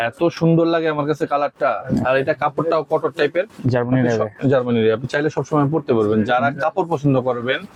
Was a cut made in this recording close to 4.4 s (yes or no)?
no